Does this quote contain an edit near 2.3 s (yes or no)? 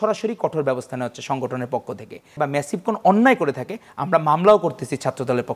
yes